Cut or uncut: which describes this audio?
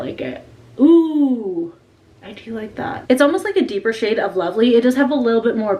uncut